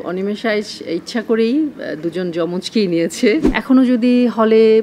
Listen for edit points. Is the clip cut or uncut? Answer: cut